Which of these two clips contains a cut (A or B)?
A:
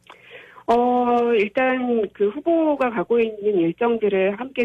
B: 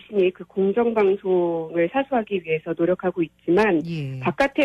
B